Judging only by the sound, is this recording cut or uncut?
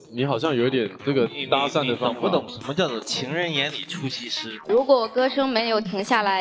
cut